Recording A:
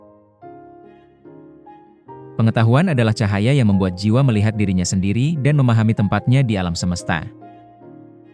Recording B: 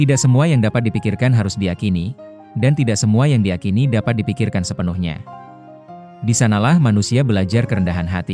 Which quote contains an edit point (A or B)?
A